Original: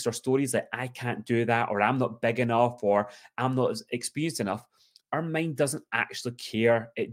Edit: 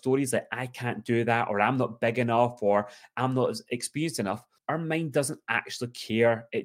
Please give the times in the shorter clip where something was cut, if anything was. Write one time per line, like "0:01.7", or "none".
0:04.5